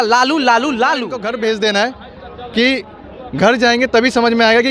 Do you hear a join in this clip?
yes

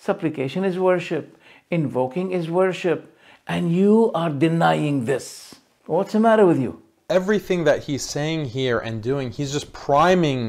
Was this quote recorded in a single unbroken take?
no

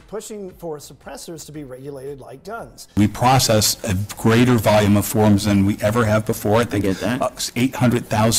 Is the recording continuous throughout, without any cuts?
yes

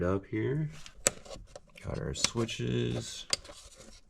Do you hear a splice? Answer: yes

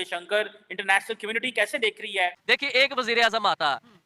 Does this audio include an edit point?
yes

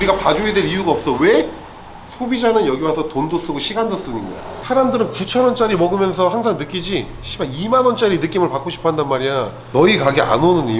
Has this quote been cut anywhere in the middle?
yes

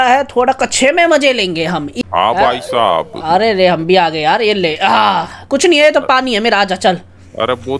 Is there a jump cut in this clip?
yes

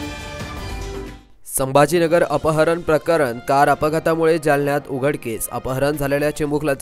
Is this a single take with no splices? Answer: no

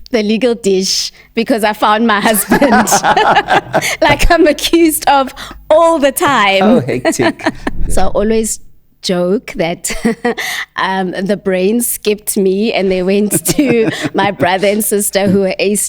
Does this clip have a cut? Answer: yes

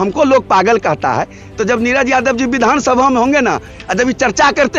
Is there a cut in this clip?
no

